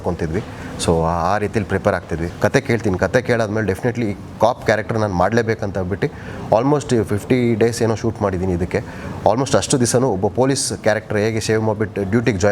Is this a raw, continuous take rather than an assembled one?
no; 1 cut; at 2.3 s

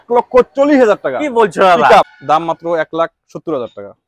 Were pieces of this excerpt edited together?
yes; 1 cut; at 2.2 s

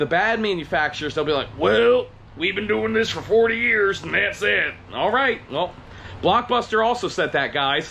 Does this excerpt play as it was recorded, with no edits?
yes; 0 cuts

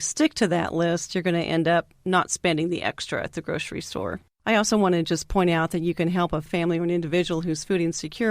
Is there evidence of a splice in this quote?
yes; 2 cuts; at 4.3 s, 6.5 s

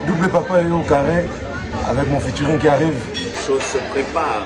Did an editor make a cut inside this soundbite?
yes; 1 cut; at 3.4 s

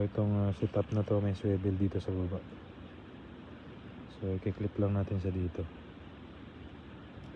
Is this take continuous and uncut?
yes; 0 cuts

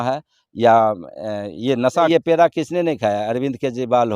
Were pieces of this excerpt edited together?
yes; 1 cut; at 2.1 s

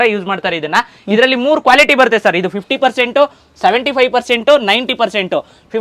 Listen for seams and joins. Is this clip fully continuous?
yes; 0 cuts

